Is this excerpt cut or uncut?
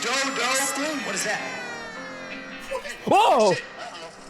uncut